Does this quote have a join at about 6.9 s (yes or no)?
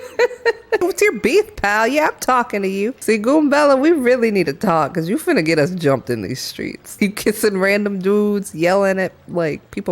yes